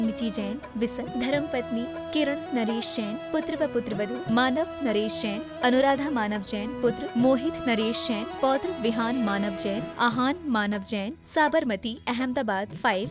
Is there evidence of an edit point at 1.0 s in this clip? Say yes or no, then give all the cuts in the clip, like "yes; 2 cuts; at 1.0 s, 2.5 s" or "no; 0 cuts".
yes; 1 cut; at 1.0 s